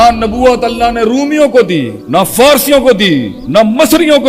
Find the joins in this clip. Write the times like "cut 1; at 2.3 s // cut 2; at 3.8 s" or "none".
cut 1; at 2.0 s // cut 2; at 3.4 s